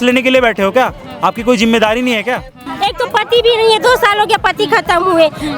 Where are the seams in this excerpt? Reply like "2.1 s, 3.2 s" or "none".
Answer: 2.7 s